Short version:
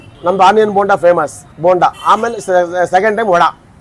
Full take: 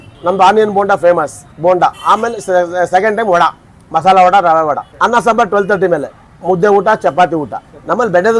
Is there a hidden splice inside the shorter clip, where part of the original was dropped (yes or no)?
no